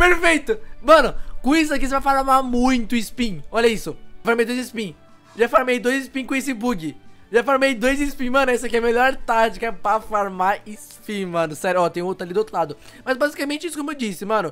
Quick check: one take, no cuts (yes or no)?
yes